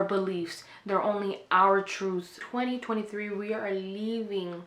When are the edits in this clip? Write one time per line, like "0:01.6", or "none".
0:02.4